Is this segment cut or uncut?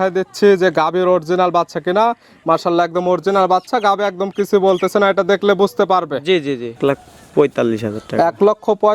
cut